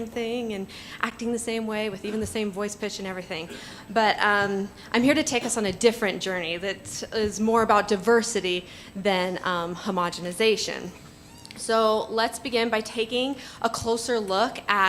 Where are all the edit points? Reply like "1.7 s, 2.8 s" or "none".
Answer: 4.3 s